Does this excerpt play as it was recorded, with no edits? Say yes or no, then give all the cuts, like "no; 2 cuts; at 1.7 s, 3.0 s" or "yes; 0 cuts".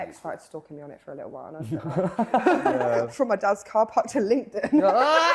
no; 1 cut; at 2.8 s